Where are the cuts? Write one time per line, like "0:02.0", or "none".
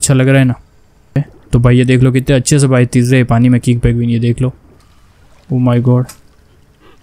0:01.2